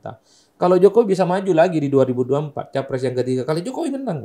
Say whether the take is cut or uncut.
uncut